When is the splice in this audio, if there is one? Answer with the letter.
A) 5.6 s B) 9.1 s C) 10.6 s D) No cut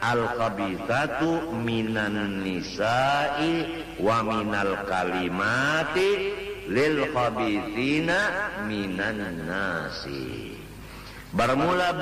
D